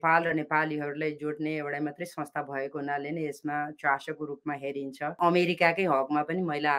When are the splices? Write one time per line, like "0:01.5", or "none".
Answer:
0:05.2